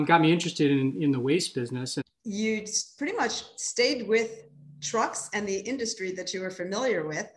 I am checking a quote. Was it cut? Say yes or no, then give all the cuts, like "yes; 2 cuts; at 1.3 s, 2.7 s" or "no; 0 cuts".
yes; 1 cut; at 2.0 s